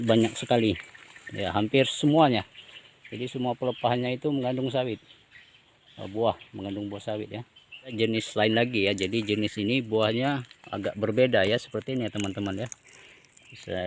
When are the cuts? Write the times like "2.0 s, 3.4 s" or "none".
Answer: 7.9 s